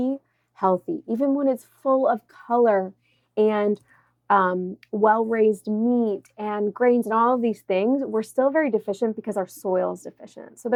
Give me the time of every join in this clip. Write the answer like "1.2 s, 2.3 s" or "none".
none